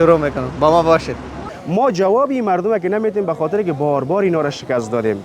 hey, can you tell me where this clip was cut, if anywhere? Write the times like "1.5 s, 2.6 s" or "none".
1.5 s